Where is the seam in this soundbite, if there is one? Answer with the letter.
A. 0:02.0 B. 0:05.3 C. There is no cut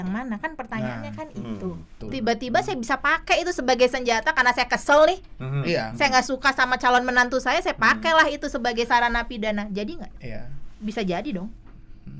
A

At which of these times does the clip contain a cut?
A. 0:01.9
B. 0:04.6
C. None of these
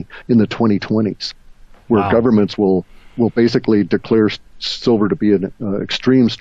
C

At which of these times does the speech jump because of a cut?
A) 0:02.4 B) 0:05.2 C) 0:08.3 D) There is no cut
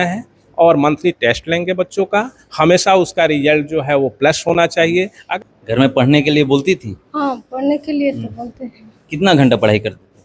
B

